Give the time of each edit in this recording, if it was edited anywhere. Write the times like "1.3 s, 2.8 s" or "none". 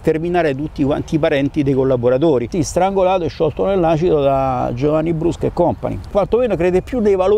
2.5 s, 6.1 s

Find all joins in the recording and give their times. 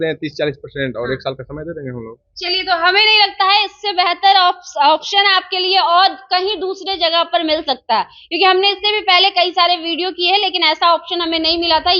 none

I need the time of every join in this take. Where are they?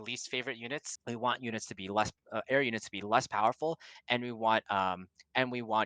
0.9 s

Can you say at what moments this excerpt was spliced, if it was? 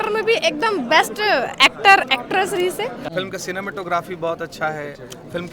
3.0 s

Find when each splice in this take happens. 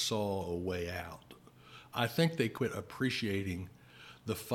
2.5 s

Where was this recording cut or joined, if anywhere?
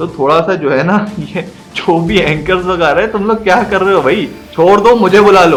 none

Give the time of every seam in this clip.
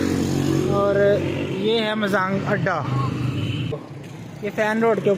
3.7 s

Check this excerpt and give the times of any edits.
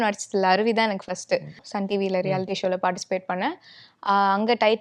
1.7 s

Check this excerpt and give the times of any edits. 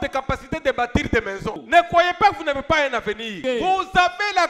1.6 s, 3.4 s

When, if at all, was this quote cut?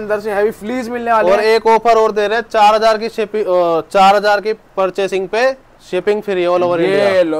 none

